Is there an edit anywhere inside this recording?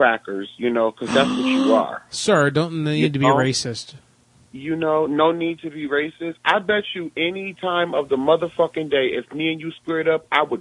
no; 0 cuts

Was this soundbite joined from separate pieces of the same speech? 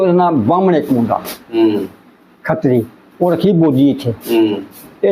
no; 0 cuts

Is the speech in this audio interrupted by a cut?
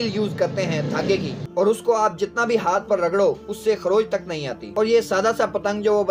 no; 0 cuts

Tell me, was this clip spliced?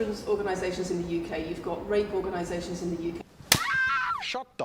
no; 0 cuts

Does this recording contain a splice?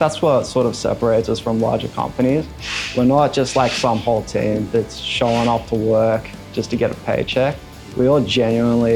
no; 0 cuts

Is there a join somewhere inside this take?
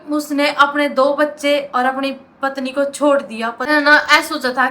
yes; 1 cut; at 3.7 s

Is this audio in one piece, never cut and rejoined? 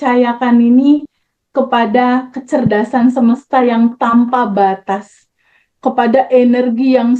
yes; 0 cuts

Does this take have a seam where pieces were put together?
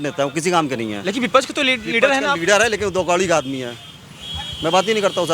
yes; 1 cut; at 1.0 s

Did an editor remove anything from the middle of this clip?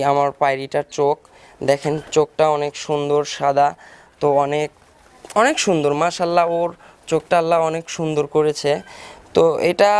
no; 0 cuts

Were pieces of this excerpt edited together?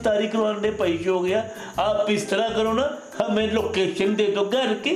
no; 0 cuts

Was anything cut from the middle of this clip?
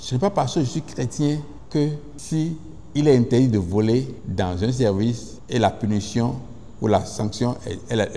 yes; 4 cuts; at 1.6 s, 2.1 s, 4.2 s, 5.3 s

